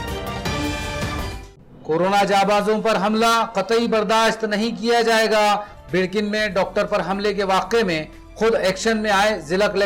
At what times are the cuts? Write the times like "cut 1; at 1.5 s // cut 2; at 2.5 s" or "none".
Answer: none